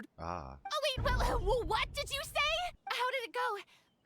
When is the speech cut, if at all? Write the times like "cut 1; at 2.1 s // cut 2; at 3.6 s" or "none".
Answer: cut 1; at 2.8 s